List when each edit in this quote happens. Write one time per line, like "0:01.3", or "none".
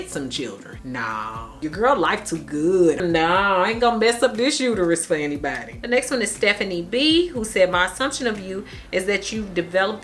0:01.7
0:05.7